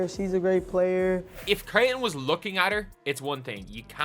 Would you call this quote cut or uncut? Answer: cut